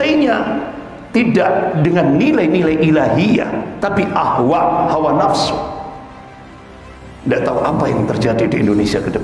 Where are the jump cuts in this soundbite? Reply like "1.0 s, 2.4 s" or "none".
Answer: 7.0 s